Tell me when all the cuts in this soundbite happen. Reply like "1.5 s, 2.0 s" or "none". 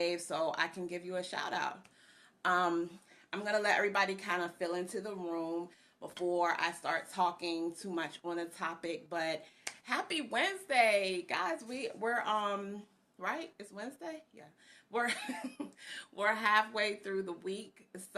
6.6 s

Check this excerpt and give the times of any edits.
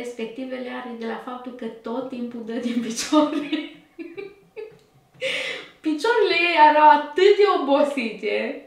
none

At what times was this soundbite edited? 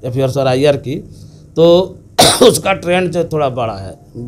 none

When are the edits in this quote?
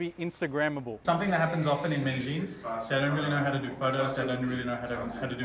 0.9 s

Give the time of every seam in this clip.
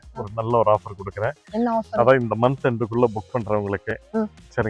none

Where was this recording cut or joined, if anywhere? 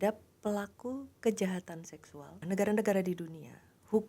2.4 s

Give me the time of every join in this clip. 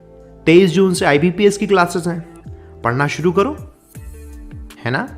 3.4 s

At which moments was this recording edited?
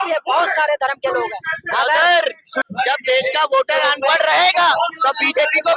2.7 s

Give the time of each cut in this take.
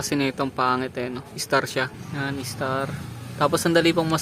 none

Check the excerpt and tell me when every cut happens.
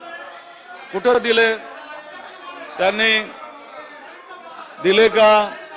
none

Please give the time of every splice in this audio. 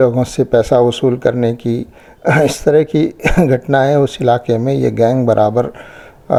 none

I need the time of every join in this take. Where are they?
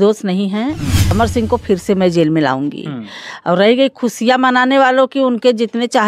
1.0 s

